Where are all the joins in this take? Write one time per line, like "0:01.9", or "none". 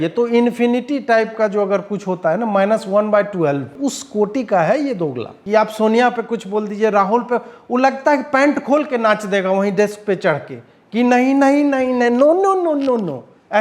0:03.7
0:05.3